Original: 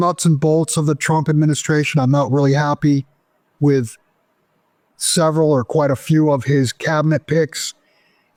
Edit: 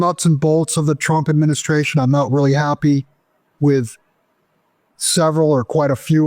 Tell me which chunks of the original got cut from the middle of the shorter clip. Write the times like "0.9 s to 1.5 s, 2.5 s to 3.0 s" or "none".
none

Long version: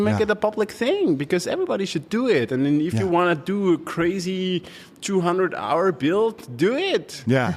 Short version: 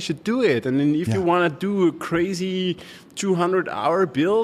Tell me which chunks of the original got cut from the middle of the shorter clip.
none

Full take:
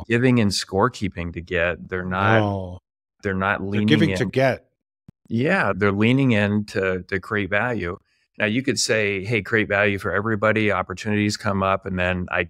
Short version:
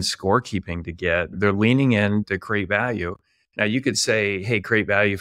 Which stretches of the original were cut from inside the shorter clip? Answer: 1.8 s to 5.8 s, 6.7 s to 7.1 s

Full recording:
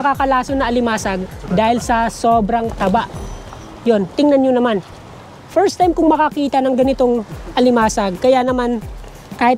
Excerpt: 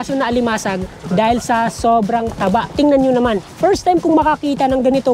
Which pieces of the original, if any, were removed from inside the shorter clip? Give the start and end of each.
3.1 s to 4.1 s, 4.9 s to 5.4 s

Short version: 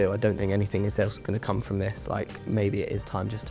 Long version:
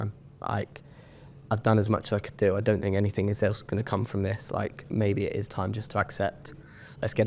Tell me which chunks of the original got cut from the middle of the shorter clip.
none

